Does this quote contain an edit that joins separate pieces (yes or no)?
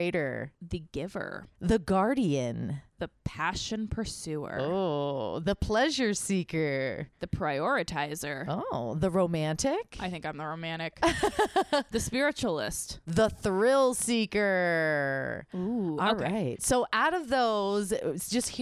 no